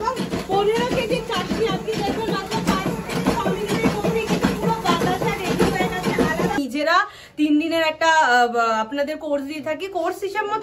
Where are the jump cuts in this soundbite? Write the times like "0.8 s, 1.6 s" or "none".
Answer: 6.6 s